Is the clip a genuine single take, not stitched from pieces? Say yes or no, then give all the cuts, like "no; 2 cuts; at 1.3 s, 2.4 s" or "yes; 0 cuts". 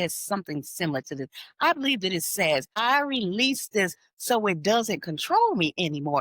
no; 1 cut; at 2.7 s